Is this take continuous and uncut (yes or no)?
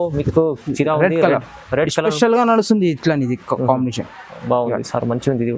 yes